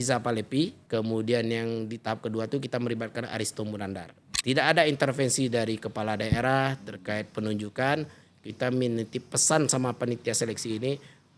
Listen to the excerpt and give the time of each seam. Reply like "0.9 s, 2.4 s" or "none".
0.8 s, 4.2 s